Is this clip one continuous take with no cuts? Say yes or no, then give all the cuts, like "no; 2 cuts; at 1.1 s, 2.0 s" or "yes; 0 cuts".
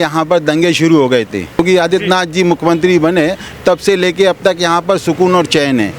no; 1 cut; at 1.6 s